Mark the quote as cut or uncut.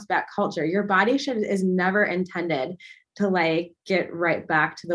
uncut